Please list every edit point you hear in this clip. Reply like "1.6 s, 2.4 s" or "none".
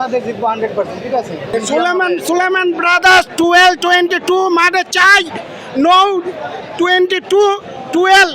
1.5 s

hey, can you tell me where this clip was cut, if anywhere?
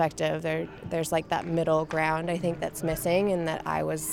none

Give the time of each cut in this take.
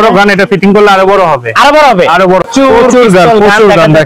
2.5 s

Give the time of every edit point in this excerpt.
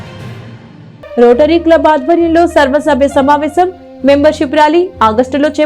none

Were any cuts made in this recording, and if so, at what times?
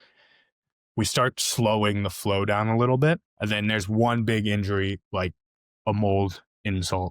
3.3 s

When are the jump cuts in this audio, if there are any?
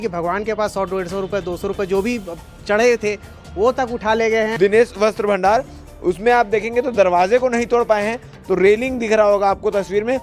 4.6 s

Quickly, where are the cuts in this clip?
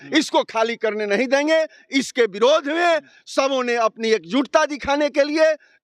none

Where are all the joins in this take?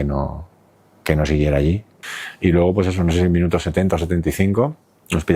2.0 s

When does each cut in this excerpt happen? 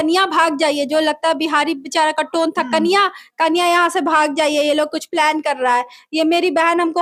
none

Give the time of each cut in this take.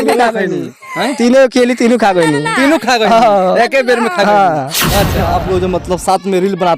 5.2 s

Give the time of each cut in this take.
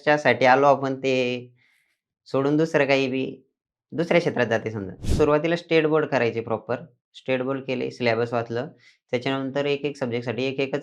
5.0 s

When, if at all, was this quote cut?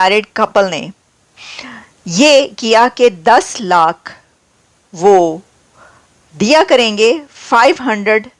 none

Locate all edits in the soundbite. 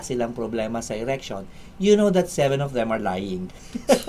none

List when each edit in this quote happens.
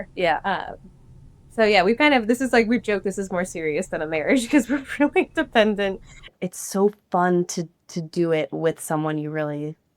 6.3 s

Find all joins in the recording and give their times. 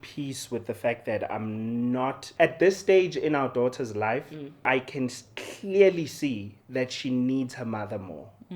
2.2 s, 4.7 s

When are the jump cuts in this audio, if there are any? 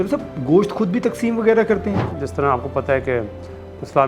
2.1 s

